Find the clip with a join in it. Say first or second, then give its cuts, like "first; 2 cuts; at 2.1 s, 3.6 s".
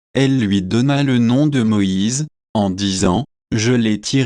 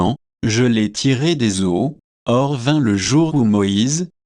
second; 1 cut; at 2.1 s